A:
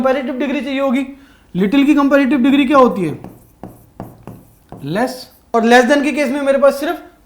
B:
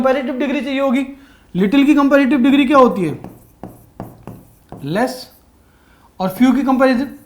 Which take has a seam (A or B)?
A